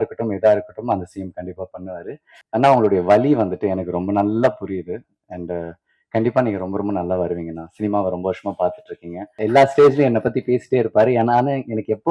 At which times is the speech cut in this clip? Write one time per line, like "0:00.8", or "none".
0:02.3
0:09.4